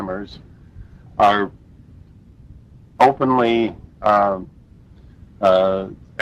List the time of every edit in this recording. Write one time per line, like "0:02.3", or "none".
none